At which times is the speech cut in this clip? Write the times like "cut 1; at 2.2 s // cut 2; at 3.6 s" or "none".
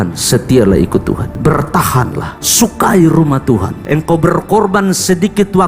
cut 1; at 1.3 s // cut 2; at 2.4 s // cut 3; at 3.8 s